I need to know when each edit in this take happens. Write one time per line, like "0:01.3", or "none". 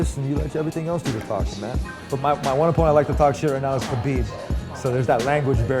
0:01.8